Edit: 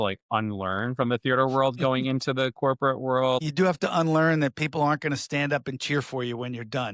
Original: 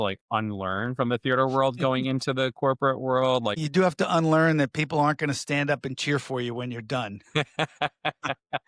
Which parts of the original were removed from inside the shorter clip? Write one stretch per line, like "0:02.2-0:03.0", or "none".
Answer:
0:03.4-0:03.6